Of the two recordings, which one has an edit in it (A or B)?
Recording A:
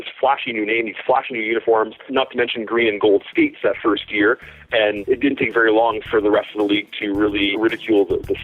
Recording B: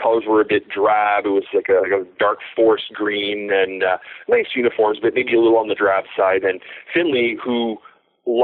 A